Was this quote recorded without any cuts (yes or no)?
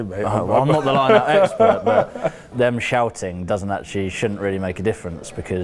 no